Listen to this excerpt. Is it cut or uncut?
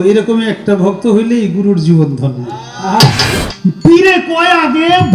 cut